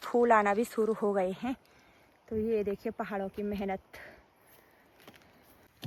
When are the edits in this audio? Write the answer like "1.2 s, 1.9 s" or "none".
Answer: none